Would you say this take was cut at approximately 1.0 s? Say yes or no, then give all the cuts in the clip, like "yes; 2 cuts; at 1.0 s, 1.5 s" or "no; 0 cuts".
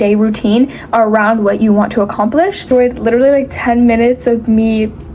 no; 1 cut; at 2.7 s